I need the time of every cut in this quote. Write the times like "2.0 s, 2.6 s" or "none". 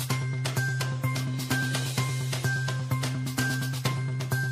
3.5 s